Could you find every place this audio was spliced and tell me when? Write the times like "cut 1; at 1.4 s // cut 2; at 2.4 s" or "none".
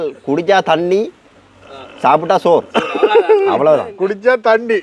none